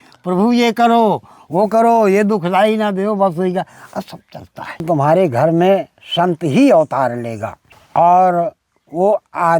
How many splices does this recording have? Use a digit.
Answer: 1